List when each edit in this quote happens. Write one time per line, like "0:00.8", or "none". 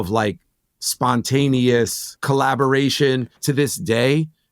0:02.1
0:03.4